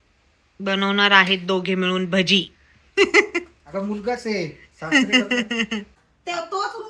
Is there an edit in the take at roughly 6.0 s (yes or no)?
yes